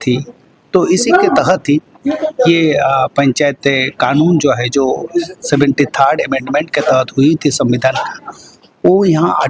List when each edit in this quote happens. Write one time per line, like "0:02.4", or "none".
none